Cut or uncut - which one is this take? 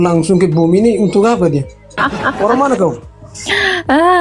cut